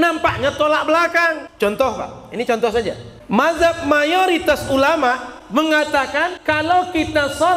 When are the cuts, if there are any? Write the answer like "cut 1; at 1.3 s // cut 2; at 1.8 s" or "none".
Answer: cut 1; at 1.5 s // cut 2; at 3.1 s // cut 3; at 5.3 s // cut 4; at 6.4 s